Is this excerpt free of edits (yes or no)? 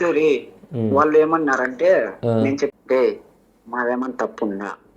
no